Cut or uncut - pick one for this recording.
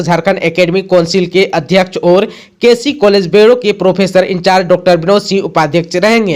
uncut